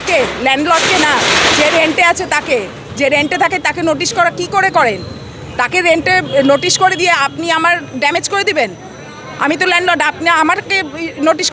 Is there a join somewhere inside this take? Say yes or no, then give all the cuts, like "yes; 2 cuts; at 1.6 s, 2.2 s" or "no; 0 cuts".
no; 0 cuts